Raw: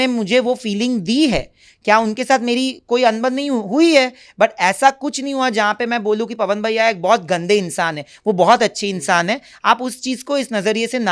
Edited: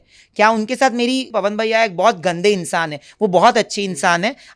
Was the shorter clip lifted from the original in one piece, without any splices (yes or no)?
no